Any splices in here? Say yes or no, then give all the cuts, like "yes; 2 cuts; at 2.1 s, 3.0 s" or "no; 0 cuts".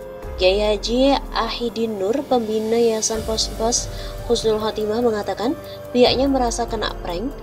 no; 0 cuts